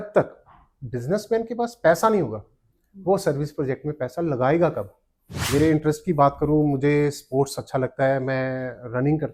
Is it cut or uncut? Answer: cut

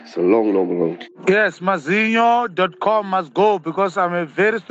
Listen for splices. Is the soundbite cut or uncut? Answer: uncut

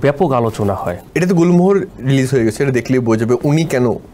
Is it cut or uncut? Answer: cut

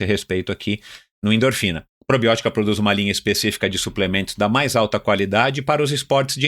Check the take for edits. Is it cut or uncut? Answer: cut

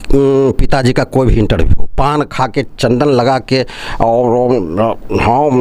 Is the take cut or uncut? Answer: uncut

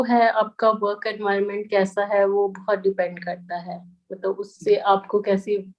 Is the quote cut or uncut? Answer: uncut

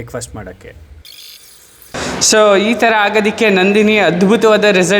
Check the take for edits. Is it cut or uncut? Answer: cut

